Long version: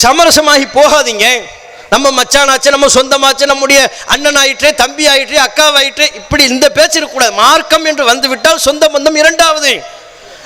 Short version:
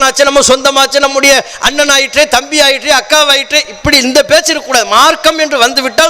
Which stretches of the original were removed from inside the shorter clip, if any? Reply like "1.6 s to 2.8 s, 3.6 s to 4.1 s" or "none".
none